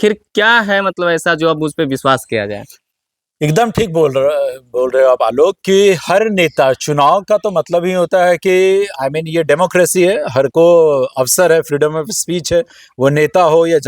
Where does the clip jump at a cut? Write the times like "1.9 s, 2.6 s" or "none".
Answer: none